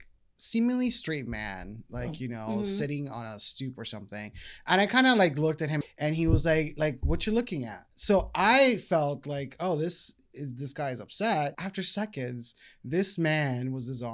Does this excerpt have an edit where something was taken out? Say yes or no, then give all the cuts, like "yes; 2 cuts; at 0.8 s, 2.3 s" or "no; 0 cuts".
yes; 2 cuts; at 5.8 s, 11.6 s